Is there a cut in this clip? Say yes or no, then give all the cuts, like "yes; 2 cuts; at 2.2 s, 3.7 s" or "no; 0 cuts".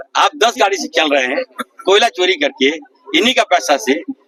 no; 0 cuts